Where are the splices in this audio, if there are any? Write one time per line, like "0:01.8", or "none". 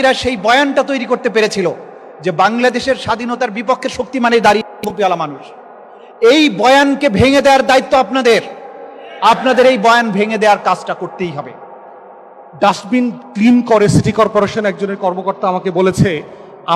0:12.4

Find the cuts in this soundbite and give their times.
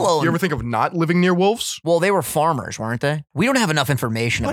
0:01.7
0:03.2

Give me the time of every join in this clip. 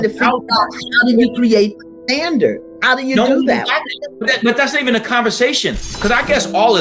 0:05.9

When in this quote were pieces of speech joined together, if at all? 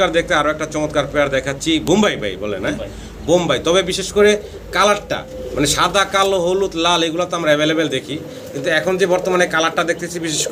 none

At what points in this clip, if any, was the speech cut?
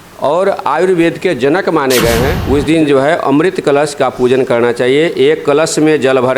0:02.4

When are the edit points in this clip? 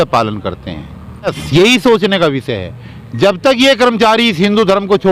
0:01.3

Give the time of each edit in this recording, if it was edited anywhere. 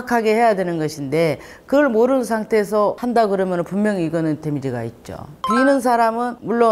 0:03.0
0:05.3

